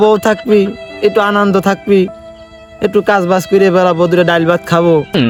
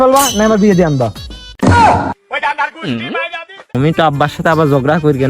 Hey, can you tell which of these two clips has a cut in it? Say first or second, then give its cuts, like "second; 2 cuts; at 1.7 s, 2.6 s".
second; 1 cut; at 3.7 s